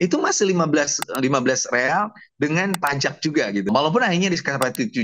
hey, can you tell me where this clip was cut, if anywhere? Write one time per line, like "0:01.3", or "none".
0:03.7